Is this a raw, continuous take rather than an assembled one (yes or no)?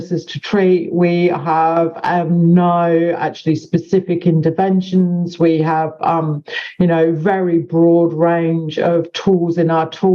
yes